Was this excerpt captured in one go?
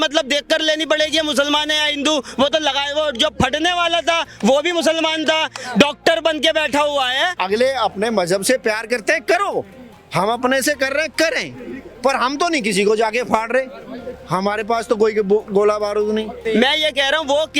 no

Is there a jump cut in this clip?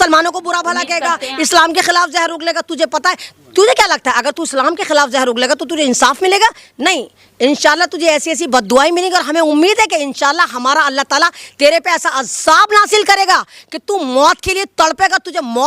no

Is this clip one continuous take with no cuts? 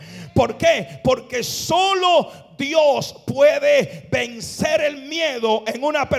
yes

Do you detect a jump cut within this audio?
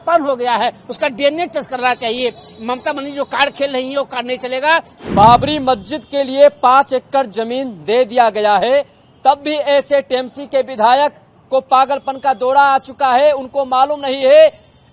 yes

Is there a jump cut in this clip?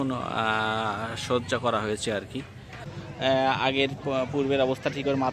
yes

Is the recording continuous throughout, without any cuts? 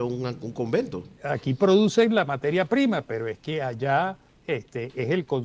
no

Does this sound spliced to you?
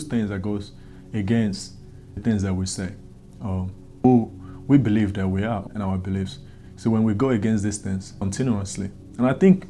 yes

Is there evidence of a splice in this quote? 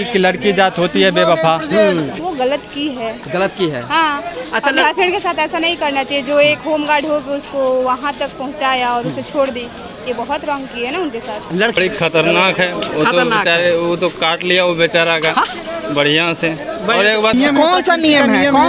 yes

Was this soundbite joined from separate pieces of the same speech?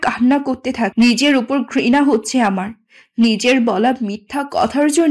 yes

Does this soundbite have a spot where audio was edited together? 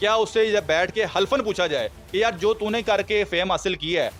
no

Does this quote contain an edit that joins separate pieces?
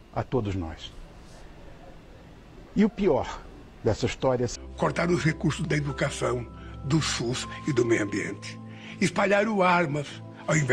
yes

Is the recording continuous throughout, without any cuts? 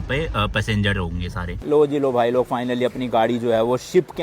no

